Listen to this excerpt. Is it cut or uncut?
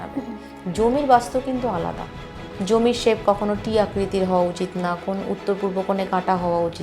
cut